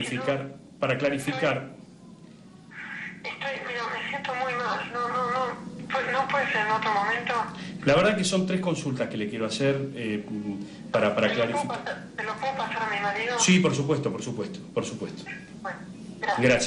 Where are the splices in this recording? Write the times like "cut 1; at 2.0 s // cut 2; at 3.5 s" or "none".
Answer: none